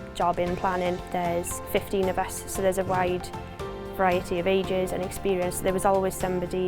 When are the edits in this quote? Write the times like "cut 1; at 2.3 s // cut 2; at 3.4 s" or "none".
cut 1; at 1.1 s